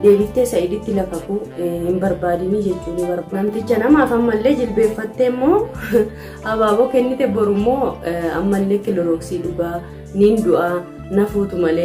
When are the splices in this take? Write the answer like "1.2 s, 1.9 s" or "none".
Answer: 3.2 s

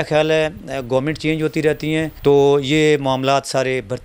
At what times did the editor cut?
2.1 s

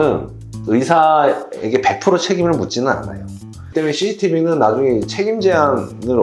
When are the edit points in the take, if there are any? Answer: 3.7 s

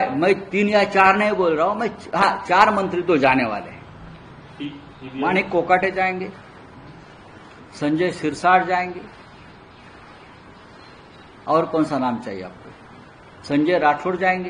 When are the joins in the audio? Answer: none

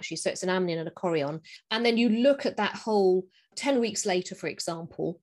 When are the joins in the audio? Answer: 3.5 s

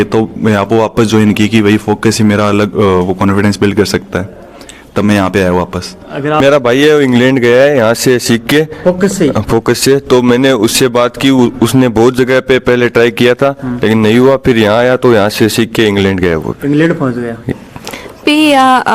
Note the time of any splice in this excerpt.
6.4 s, 17.4 s

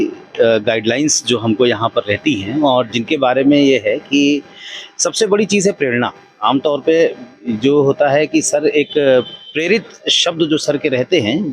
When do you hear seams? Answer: none

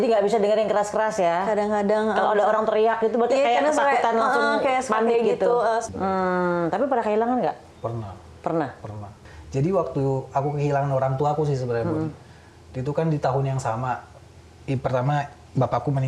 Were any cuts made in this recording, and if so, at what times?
5.9 s, 7.7 s

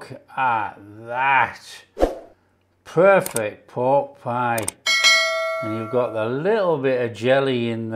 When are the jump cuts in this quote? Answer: none

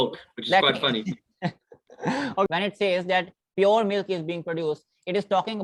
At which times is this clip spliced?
2.5 s

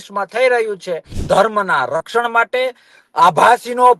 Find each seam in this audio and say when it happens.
1.1 s

